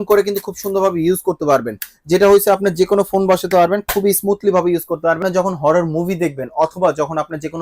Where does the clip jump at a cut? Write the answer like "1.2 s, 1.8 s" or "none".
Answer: 5.2 s